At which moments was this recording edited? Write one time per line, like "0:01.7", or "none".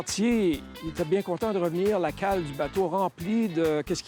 none